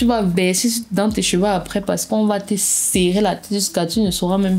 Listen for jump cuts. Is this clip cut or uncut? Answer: uncut